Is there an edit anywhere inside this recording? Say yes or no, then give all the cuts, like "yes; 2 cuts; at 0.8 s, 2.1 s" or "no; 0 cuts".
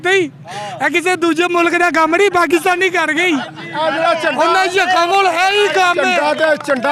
no; 0 cuts